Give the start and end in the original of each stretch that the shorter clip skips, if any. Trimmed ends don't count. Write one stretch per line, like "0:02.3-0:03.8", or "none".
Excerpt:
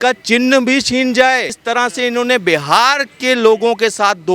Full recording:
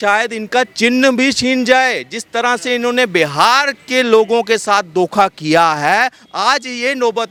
0:02.1-0:02.2